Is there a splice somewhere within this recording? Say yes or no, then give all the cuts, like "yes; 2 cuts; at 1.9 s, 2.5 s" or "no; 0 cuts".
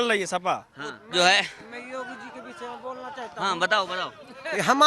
yes; 1 cut; at 1.0 s